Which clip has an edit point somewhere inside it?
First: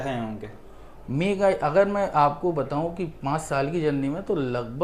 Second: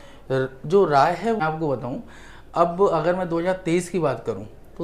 second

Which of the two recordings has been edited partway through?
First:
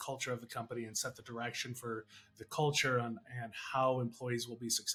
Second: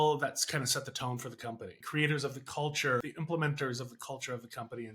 second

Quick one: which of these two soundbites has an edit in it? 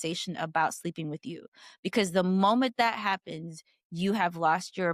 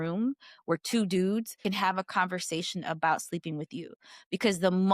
second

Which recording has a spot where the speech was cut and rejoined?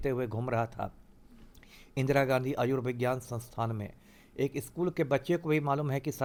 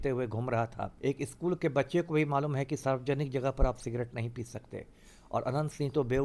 second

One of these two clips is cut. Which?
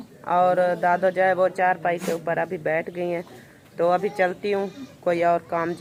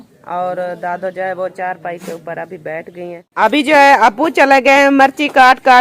second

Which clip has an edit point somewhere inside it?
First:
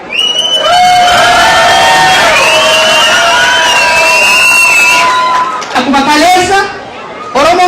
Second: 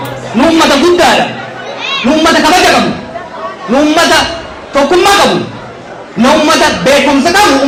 first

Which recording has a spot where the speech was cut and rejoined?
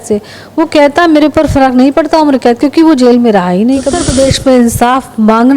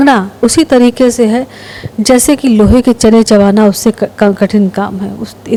first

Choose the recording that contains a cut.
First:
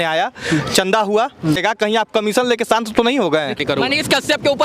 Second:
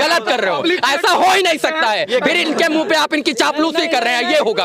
first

